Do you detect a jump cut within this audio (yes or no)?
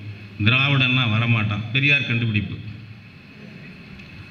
no